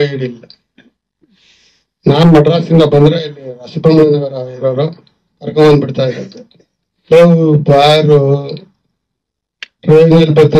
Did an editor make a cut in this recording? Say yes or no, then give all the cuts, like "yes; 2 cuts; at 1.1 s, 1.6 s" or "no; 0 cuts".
no; 0 cuts